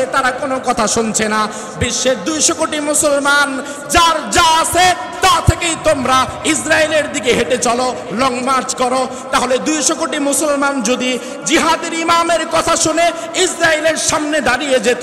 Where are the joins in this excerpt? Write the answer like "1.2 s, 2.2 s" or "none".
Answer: none